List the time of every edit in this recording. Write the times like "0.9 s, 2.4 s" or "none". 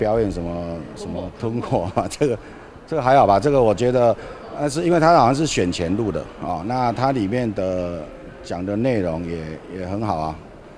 none